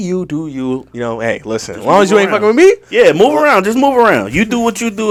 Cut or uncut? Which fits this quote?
uncut